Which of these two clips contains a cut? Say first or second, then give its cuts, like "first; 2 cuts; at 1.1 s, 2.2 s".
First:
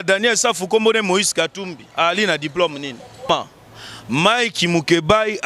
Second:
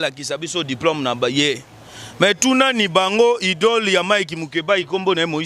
first; 1 cut; at 3.3 s